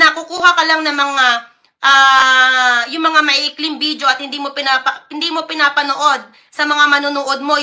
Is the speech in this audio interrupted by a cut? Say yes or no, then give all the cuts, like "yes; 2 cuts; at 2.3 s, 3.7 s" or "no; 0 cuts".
no; 0 cuts